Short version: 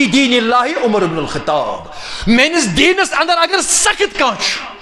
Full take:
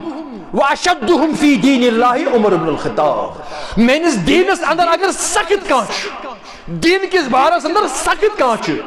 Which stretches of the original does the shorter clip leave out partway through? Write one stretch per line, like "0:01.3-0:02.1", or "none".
none